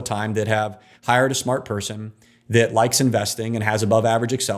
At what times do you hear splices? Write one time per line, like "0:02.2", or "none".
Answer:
none